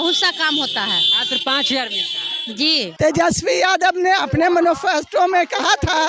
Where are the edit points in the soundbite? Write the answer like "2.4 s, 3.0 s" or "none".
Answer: 2.9 s

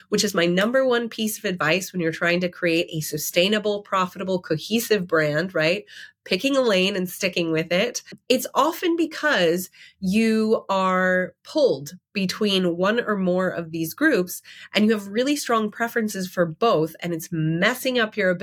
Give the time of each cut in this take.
8.1 s

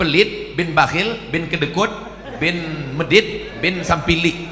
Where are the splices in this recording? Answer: none

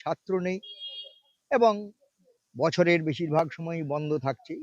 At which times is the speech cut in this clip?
none

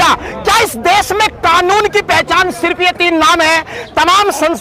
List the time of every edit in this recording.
none

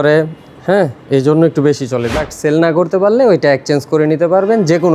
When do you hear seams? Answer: 2.1 s

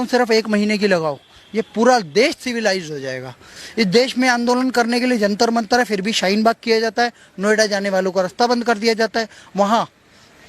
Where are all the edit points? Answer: 3.4 s

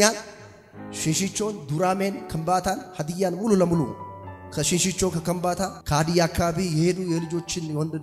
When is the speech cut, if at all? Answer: none

